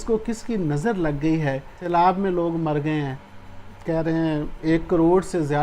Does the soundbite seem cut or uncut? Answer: cut